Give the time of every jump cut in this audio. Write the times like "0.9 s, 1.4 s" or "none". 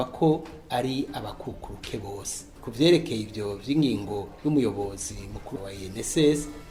none